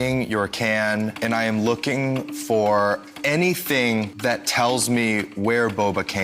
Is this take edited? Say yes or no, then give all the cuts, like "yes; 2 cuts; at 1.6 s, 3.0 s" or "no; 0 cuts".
yes; 2 cuts; at 1.1 s, 4.1 s